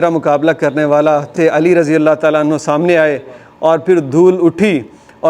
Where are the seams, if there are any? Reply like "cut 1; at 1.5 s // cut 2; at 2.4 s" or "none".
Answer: cut 1; at 1.3 s